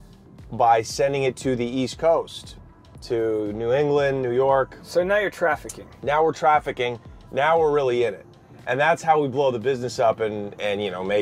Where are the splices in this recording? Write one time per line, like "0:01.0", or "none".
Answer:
none